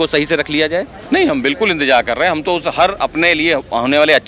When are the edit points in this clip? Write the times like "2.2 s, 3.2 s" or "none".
0.9 s